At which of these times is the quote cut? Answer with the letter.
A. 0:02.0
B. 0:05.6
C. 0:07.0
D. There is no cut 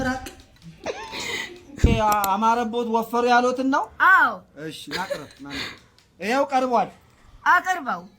A